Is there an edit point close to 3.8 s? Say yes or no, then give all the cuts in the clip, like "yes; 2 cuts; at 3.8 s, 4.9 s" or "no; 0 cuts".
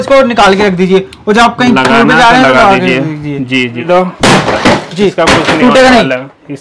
yes; 1 cut; at 3.8 s